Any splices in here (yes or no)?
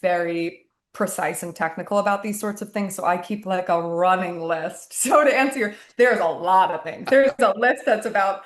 no